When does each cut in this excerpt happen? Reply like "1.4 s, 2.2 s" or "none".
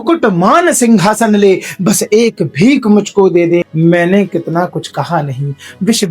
3.7 s